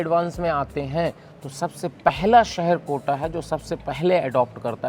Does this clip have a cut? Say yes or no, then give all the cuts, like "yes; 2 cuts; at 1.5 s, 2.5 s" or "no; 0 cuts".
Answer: no; 0 cuts